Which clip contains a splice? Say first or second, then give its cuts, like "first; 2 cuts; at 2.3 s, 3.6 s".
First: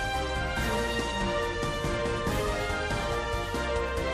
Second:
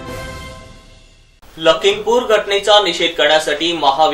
second; 1 cut; at 1.1 s